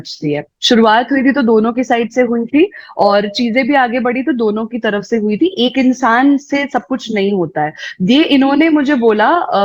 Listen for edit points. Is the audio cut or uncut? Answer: uncut